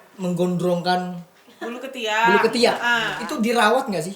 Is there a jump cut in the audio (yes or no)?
yes